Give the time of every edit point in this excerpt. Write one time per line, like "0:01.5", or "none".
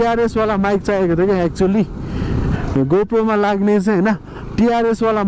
0:02.5